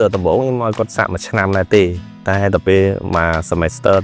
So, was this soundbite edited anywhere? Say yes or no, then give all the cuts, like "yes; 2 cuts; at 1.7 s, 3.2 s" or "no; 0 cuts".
yes; 1 cut; at 0.9 s